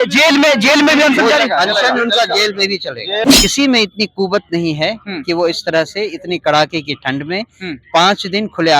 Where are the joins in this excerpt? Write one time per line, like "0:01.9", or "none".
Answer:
0:03.3